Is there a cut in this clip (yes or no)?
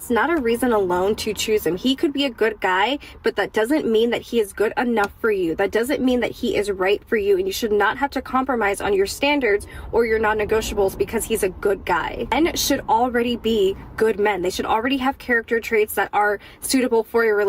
yes